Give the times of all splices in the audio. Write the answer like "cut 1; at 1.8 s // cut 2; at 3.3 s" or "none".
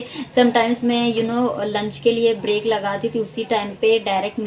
none